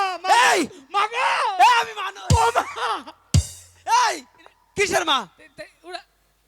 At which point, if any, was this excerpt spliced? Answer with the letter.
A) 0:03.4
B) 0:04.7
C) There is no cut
C